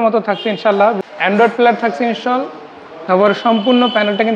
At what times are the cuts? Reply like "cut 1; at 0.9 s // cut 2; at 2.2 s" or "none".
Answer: cut 1; at 1.0 s